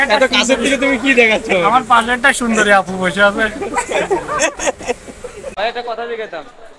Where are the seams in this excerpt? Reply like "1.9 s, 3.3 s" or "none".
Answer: 5.4 s

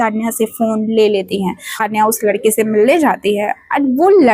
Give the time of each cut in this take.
1.8 s

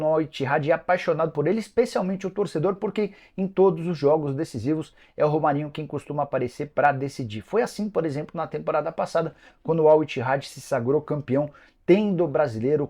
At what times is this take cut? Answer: none

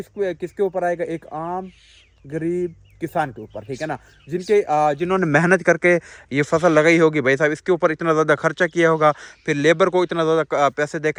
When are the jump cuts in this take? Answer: none

